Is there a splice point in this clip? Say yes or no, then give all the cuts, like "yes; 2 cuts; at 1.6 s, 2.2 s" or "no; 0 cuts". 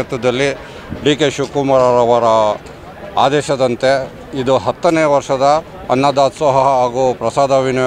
no; 0 cuts